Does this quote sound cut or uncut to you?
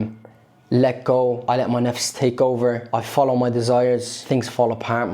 cut